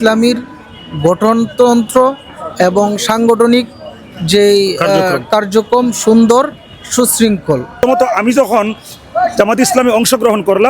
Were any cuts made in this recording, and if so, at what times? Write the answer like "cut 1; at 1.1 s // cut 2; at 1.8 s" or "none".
cut 1; at 7.8 s